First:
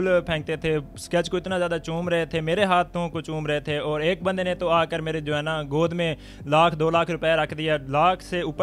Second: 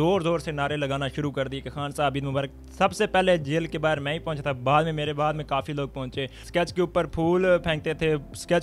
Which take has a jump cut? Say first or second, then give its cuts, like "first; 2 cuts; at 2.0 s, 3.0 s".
second; 1 cut; at 6.4 s